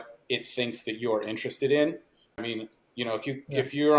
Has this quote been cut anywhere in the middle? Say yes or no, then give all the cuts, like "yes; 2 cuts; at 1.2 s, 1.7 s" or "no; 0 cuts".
yes; 1 cut; at 2.4 s